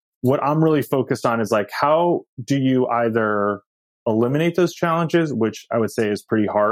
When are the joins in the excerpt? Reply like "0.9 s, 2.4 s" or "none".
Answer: none